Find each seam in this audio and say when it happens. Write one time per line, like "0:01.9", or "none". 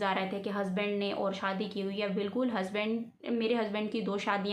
none